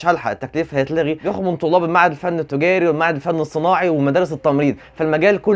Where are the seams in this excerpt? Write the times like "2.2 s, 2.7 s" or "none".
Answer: 1.2 s